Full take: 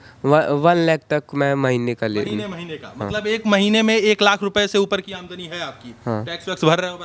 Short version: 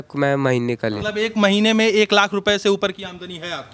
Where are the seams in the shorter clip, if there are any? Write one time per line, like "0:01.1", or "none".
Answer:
0:01.0